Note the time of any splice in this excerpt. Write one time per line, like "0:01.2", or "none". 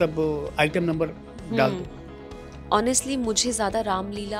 0:02.5